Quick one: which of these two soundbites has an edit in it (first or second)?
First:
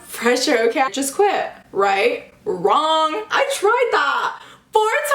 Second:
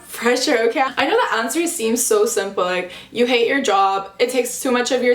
first